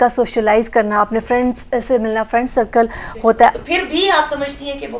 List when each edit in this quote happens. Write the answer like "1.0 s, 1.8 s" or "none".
3.5 s